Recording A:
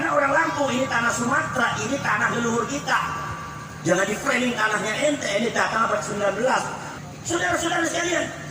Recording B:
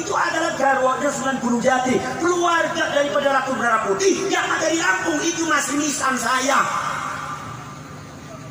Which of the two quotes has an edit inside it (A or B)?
A